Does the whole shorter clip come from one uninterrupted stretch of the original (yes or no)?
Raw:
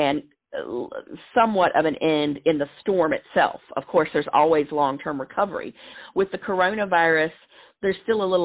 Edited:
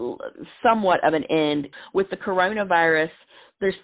no